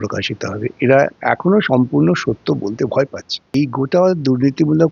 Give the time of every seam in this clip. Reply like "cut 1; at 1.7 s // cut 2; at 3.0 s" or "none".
cut 1; at 3.5 s